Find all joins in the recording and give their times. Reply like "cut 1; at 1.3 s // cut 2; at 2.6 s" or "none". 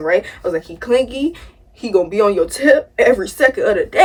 none